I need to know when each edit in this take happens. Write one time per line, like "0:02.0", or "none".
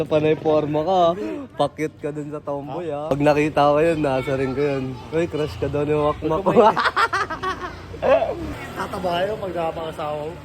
0:03.1